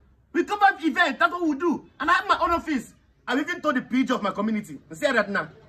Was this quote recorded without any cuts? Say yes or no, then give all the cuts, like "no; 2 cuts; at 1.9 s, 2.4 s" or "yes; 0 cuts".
no; 1 cut; at 3.3 s